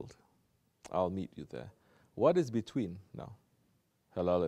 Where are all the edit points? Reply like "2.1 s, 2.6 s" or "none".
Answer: none